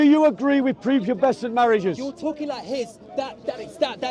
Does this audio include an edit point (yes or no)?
no